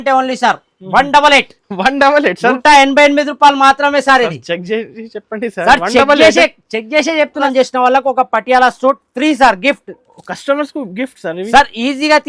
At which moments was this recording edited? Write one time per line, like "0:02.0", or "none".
0:07.5